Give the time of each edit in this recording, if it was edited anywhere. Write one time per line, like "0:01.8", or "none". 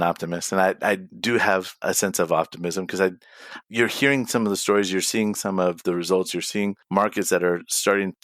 0:01.8